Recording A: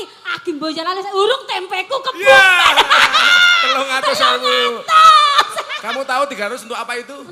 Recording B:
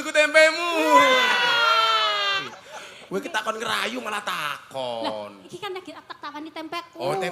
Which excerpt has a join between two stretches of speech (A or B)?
B